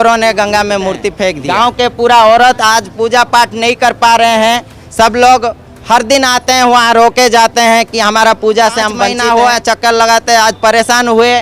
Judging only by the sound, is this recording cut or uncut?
cut